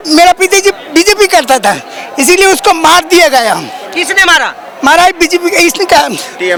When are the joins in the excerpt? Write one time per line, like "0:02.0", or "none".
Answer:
none